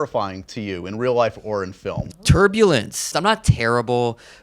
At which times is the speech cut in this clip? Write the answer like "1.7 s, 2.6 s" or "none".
2.0 s, 3.1 s